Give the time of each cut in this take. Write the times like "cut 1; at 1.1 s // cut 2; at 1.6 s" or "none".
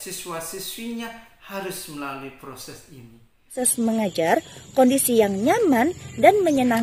cut 1; at 3.5 s